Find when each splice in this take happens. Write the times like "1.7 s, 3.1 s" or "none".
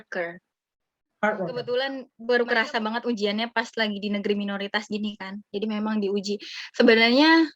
2.1 s